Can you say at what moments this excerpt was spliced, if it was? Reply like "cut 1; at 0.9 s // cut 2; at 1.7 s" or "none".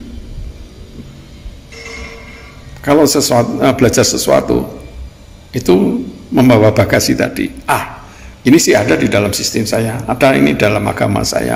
none